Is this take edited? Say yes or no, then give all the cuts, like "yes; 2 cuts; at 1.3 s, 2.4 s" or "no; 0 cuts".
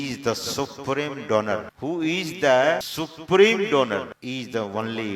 yes; 3 cuts; at 1.7 s, 2.9 s, 4.1 s